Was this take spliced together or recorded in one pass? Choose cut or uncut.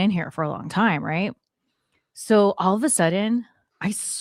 uncut